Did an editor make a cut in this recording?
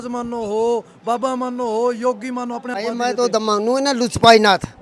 yes; 1 cut; at 2.7 s

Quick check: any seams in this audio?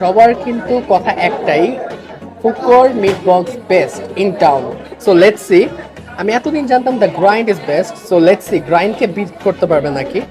no; 0 cuts

